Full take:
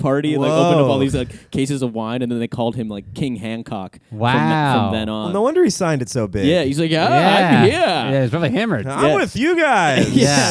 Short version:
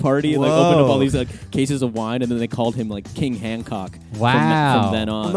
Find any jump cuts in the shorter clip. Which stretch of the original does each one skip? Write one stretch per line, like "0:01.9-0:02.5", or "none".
none